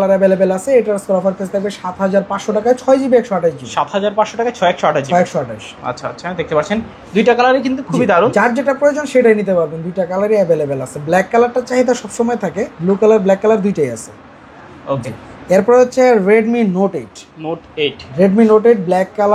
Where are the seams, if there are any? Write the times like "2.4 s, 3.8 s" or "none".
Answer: none